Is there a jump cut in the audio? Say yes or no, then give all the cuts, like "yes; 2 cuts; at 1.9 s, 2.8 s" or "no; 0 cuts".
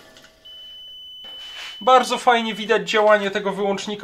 yes; 1 cut; at 1.3 s